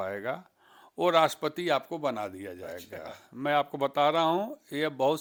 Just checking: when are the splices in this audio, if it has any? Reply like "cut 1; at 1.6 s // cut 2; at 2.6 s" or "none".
none